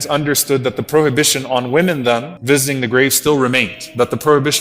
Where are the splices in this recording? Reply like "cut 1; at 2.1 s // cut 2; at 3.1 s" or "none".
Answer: cut 1; at 2.3 s